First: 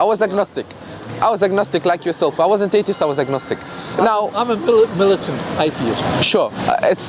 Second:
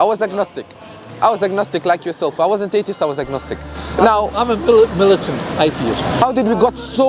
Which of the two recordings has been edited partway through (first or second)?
second